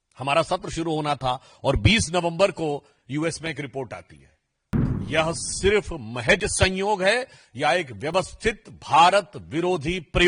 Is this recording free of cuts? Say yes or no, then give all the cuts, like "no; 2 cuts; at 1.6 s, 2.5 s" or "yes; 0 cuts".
no; 1 cut; at 4.8 s